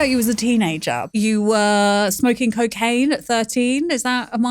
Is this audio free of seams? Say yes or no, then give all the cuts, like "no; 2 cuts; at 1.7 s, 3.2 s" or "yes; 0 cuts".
no; 1 cut; at 1.0 s